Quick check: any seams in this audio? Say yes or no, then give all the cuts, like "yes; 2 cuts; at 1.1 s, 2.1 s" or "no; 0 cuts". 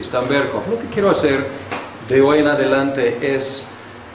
yes; 1 cut; at 1.5 s